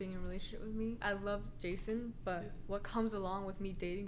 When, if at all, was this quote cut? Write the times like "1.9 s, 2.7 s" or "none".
0.9 s